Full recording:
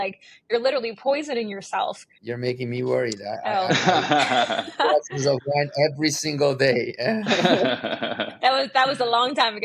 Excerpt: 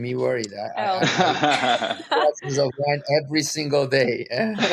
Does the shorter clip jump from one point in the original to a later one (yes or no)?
no